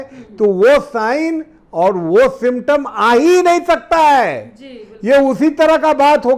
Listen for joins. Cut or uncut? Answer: uncut